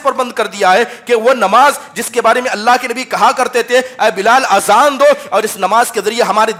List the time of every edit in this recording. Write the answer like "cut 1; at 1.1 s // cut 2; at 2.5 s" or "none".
none